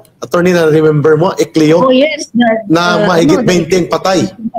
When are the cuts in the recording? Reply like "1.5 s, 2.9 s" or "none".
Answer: none